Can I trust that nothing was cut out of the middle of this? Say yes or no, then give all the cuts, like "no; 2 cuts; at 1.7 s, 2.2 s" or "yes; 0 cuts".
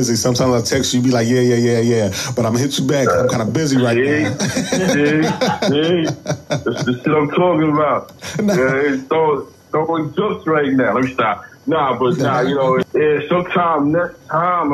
no; 1 cut; at 12.8 s